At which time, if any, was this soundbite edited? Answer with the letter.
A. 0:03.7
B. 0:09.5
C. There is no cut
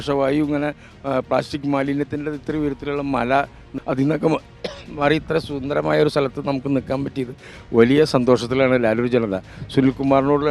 A